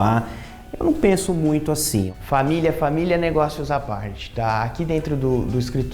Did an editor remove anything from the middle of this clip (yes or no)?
yes